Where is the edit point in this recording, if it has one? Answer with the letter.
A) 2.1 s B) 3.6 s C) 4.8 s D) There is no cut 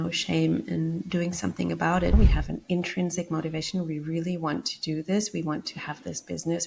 A